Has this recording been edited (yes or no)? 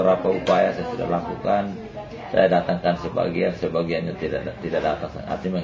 no